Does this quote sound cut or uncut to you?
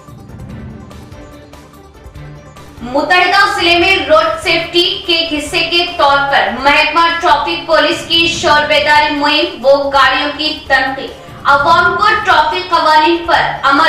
cut